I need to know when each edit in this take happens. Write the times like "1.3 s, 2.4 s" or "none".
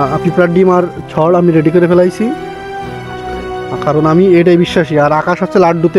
none